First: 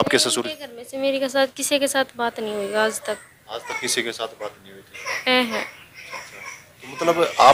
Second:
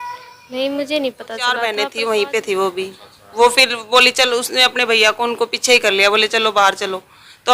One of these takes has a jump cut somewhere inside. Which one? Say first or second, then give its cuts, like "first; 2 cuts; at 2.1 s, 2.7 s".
second; 1 cut; at 1.6 s